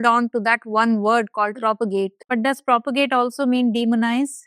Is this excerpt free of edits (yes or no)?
no